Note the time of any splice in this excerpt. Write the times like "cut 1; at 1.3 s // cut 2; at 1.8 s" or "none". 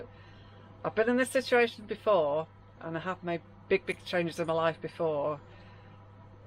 none

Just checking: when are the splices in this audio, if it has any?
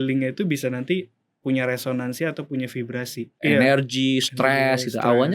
cut 1; at 3.4 s

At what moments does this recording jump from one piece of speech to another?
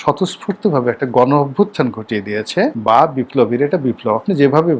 cut 1; at 2.8 s

